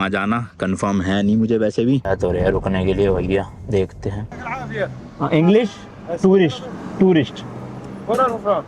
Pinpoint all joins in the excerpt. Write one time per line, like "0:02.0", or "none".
0:02.1
0:04.7

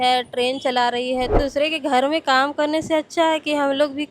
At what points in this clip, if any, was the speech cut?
0:01.4

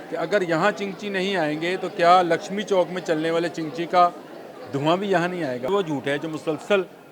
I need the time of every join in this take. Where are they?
0:05.7

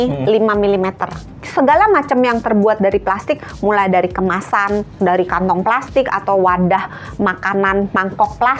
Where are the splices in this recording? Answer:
0:01.4

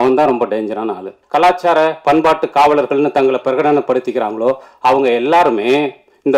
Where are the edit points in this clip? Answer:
0:01.2

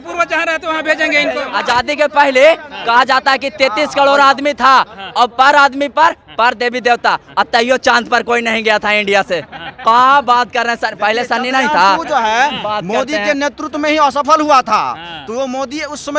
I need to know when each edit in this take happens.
0:01.5

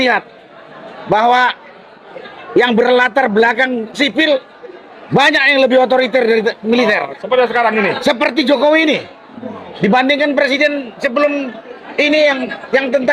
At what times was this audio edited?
none

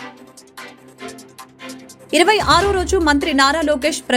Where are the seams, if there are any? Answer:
none

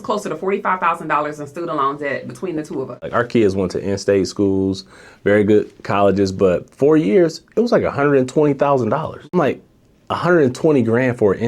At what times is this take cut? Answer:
0:03.0
0:09.3

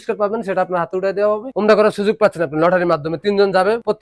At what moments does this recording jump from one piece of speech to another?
0:01.5

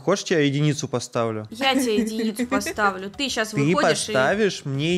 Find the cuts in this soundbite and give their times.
none

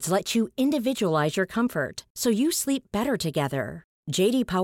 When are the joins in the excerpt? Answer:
none

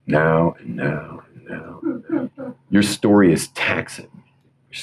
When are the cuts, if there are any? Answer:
0:01.7

